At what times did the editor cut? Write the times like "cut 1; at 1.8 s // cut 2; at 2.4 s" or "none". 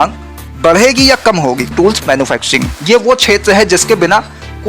cut 1; at 1.7 s